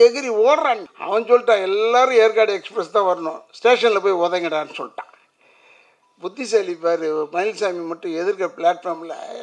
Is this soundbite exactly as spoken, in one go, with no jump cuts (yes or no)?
no